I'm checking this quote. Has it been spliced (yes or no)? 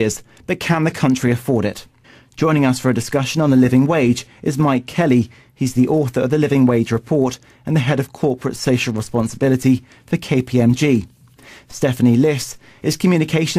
no